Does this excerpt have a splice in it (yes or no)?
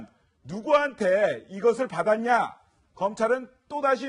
no